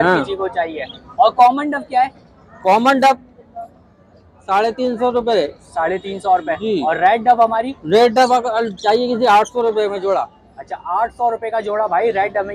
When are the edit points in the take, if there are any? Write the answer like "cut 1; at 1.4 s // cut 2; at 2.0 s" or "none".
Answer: none